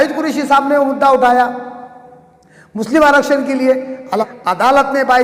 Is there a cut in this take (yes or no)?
yes